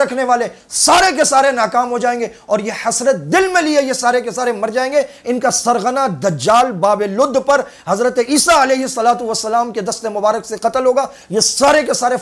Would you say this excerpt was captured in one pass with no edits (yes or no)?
yes